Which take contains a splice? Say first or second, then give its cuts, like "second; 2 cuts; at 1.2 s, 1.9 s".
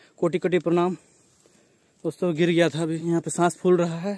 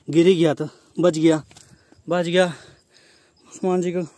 first; 1 cut; at 3.0 s